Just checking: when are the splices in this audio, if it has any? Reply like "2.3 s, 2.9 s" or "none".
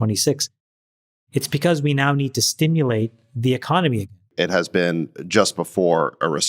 4.3 s